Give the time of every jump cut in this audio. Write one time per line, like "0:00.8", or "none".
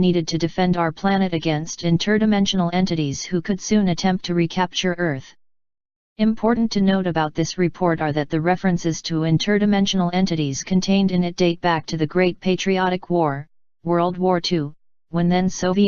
0:03.3